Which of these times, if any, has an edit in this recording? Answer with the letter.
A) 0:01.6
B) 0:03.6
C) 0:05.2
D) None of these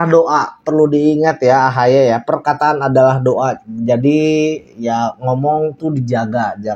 D